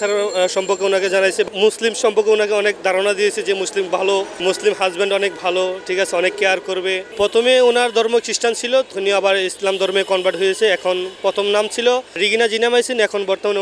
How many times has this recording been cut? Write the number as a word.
five